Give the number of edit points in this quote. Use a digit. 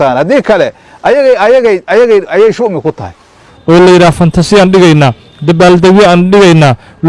1